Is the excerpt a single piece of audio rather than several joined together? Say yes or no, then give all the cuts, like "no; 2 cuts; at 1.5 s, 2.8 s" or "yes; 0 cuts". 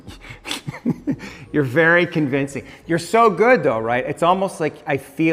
yes; 0 cuts